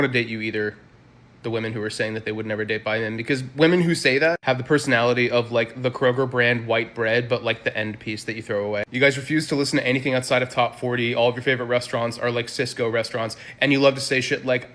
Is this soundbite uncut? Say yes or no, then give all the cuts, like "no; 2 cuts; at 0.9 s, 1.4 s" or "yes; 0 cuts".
yes; 0 cuts